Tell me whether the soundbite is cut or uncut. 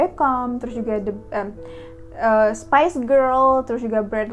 uncut